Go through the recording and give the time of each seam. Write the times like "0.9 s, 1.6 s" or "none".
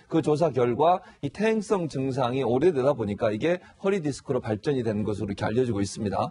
5.1 s